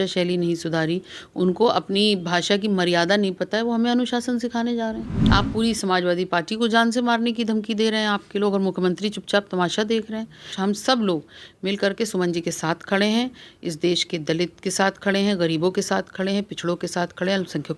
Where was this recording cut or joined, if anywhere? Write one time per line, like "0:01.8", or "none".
0:05.1
0:10.5